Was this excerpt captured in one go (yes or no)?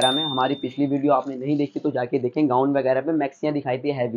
yes